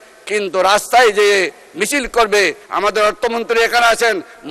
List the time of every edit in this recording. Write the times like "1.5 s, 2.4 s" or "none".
2.6 s